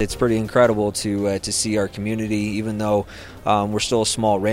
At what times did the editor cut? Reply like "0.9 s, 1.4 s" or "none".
none